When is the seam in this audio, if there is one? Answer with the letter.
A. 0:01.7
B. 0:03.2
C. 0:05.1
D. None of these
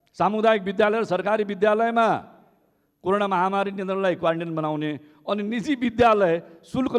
D